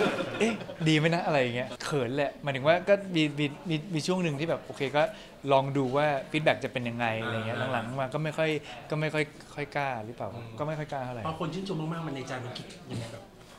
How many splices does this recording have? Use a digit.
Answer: 1